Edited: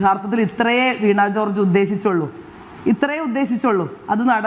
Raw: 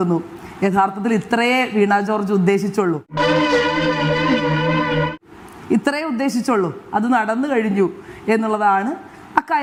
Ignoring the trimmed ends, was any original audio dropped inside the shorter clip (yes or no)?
yes